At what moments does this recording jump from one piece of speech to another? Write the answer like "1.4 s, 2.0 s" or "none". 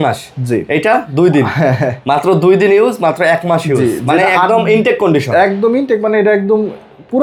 none